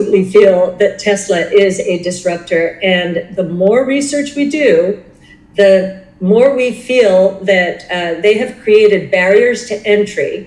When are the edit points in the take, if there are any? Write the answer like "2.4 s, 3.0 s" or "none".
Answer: none